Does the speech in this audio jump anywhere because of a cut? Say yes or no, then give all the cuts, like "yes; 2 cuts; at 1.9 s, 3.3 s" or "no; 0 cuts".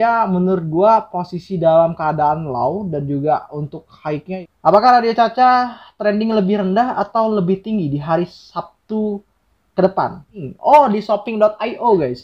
yes; 2 cuts; at 4.4 s, 10.3 s